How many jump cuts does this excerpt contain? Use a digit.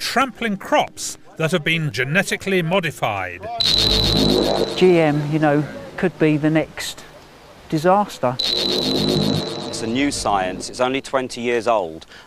1